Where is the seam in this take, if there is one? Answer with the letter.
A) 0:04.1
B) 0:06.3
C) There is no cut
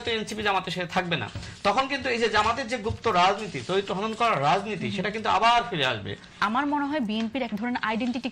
B